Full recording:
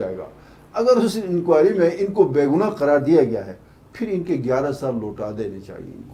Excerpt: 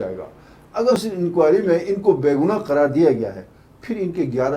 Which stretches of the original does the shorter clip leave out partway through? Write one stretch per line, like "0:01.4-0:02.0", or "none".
0:00.9-0:01.0

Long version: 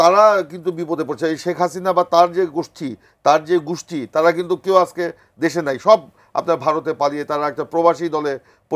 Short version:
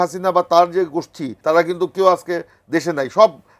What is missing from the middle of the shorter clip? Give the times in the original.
0:02.9-0:04.0

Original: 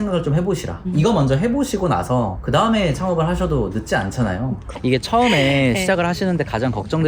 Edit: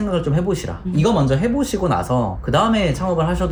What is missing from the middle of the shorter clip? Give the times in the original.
none

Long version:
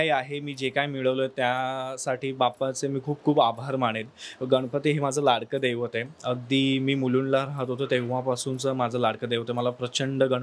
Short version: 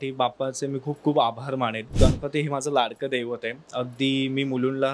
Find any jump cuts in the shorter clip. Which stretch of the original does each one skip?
0:04.1-0:04.4

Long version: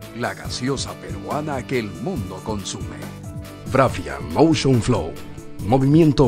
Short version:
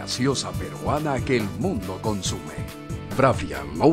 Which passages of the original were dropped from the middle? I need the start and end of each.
0:02.9-0:03.0

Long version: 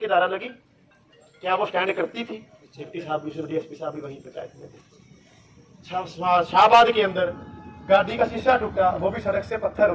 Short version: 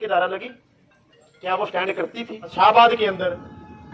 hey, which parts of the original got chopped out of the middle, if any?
0:02.5-0:06.5

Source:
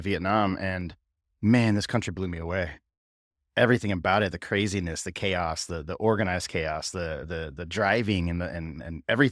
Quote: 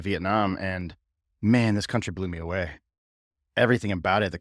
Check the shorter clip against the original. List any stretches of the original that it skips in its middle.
none

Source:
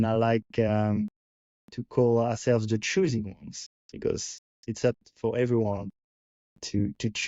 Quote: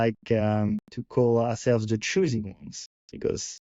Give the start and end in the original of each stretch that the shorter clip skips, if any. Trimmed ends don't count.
0:01.2-0:01.8

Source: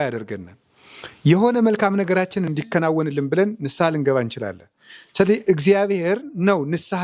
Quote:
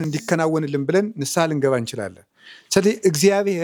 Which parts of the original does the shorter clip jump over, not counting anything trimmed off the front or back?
none

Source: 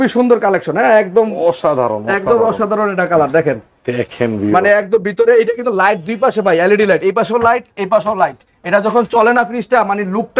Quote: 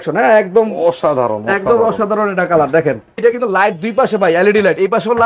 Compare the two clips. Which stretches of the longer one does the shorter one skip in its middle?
0:03.8-0:05.4

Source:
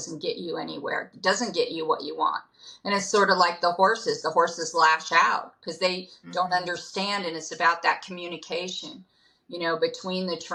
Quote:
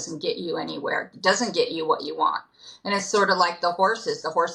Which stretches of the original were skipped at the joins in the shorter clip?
none

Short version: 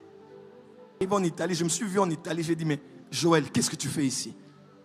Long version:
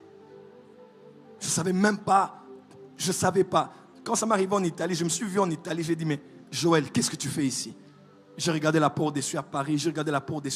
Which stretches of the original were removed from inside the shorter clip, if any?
0:01.0-0:04.4

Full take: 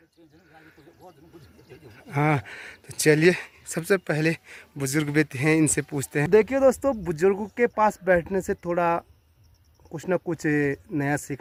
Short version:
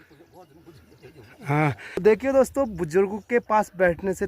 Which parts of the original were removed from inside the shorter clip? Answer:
0:02.7-0:06.3

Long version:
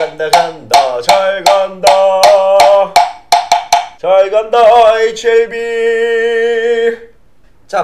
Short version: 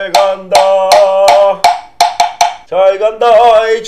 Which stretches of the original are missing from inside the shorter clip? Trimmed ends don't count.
none

